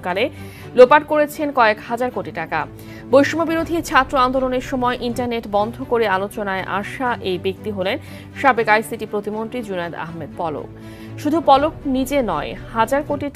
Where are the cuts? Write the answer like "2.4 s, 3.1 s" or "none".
10.8 s